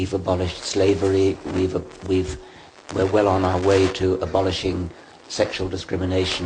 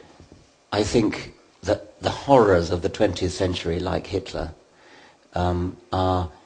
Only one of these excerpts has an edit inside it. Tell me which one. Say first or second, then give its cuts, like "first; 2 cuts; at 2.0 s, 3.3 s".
second; 1 cut; at 1.4 s